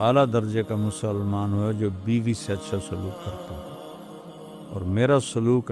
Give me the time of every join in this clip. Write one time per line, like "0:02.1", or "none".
0:03.4
0:04.7